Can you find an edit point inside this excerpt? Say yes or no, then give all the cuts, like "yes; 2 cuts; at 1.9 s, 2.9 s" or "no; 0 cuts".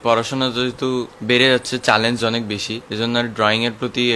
yes; 2 cuts; at 1.1 s, 2.8 s